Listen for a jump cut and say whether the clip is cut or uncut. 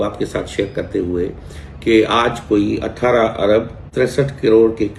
cut